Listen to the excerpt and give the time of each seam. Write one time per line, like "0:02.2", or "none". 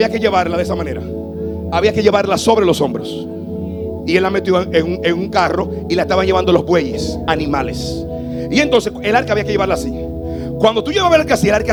none